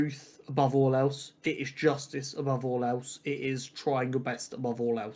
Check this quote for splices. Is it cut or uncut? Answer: uncut